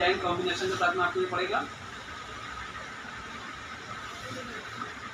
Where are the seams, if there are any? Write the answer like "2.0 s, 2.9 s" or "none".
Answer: none